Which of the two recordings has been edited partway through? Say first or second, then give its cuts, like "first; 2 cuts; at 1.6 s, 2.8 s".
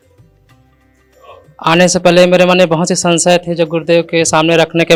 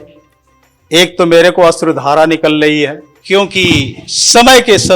second; 1 cut; at 3.1 s